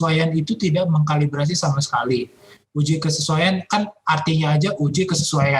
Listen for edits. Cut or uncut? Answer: uncut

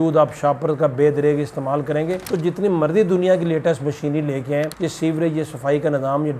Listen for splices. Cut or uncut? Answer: uncut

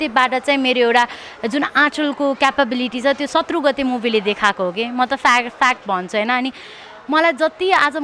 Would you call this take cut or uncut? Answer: uncut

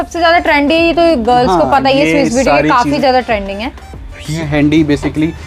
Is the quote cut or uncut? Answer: cut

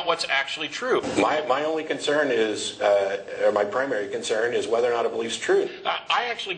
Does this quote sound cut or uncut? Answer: cut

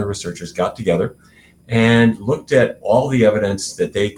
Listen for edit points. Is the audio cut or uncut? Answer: uncut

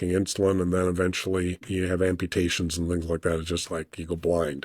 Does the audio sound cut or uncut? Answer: uncut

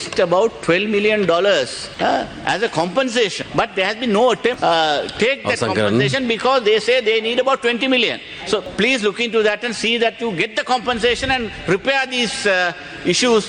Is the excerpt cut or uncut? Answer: cut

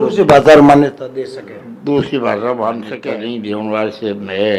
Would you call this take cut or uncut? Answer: cut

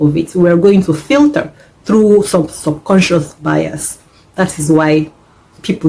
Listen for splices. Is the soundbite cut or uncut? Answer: uncut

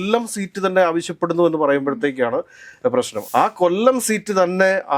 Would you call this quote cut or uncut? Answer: cut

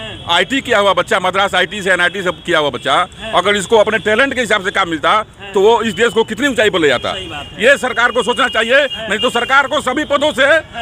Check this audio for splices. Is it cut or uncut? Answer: uncut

